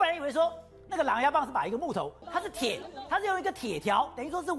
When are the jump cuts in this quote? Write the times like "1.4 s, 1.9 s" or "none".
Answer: 2.2 s